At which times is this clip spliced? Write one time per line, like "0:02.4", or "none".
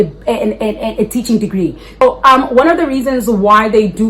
0:02.0